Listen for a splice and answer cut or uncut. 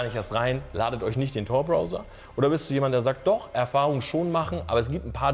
uncut